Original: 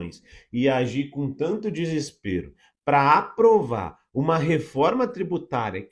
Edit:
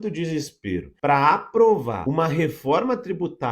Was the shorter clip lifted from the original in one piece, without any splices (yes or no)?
no